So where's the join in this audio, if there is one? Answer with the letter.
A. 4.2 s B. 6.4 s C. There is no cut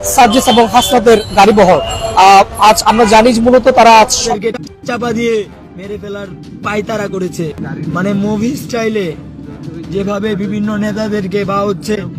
A